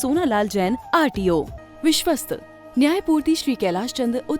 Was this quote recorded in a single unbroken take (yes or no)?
no